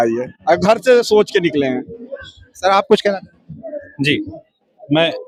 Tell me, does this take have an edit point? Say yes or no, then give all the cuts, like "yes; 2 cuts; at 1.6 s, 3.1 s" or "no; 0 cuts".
no; 0 cuts